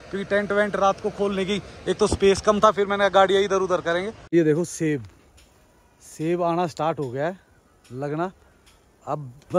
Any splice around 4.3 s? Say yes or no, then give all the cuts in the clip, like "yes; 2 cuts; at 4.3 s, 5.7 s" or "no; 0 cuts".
yes; 1 cut; at 4.3 s